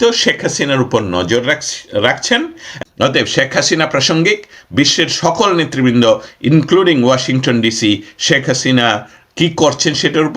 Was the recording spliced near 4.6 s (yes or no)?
no